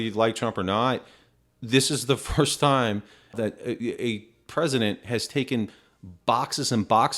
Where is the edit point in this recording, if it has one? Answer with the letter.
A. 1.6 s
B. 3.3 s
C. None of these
B